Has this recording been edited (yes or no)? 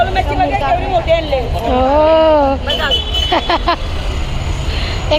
no